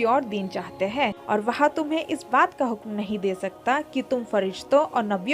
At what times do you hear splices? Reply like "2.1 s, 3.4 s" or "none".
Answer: 1.2 s

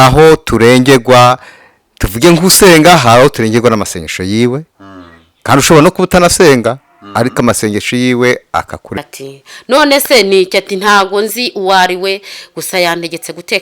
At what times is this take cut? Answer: 9.0 s

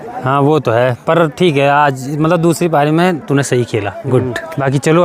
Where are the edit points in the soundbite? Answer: none

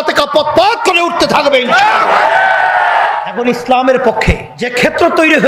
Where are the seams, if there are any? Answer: 3.2 s, 4.6 s

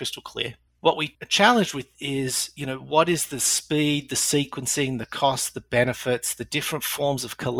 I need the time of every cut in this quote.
1.1 s

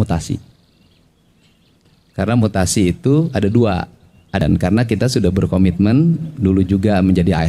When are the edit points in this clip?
4.4 s

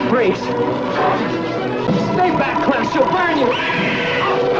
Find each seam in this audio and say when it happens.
1.9 s

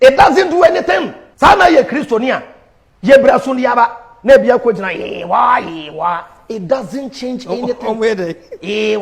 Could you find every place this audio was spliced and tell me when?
1.2 s

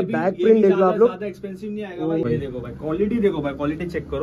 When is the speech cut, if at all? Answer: 2.2 s

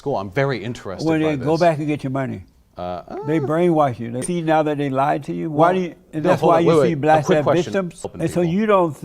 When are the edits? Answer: 4.2 s, 8.1 s

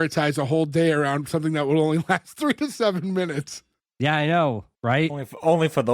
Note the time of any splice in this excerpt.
4.7 s

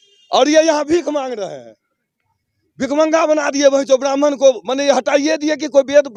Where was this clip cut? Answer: none

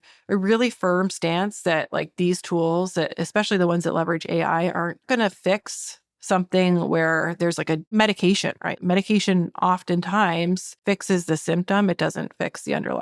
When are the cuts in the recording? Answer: 5.0 s, 7.9 s, 8.8 s, 10.7 s

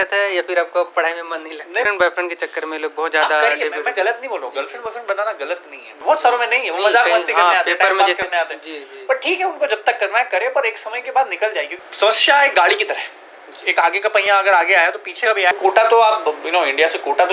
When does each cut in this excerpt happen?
1.9 s, 6.0 s, 11.8 s, 15.5 s

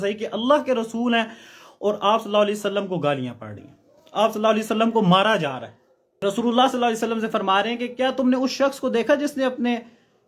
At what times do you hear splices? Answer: 6.2 s

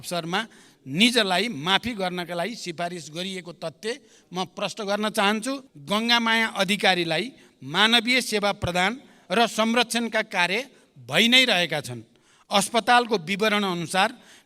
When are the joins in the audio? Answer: 5.7 s

